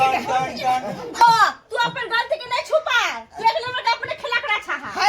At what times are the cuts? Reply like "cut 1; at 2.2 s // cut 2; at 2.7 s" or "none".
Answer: cut 1; at 1.2 s